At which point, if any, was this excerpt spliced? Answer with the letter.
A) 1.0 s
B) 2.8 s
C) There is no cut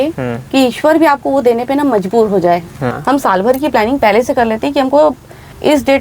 B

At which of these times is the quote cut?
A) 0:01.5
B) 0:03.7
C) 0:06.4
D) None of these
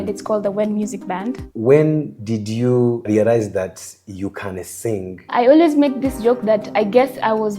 A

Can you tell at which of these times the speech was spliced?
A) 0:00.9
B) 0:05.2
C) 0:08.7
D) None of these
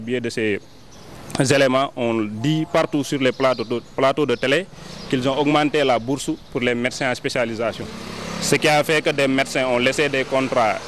D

